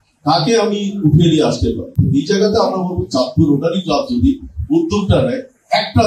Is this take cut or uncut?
uncut